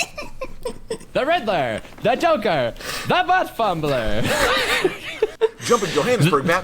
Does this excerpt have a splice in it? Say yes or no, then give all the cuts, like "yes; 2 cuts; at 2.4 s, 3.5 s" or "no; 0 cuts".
yes; 1 cut; at 5.3 s